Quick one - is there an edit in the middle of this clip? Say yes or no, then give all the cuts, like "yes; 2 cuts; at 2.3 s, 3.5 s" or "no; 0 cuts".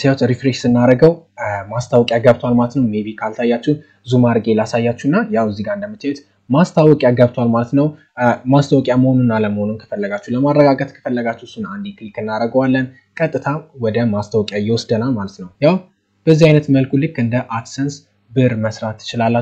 yes; 1 cut; at 15.4 s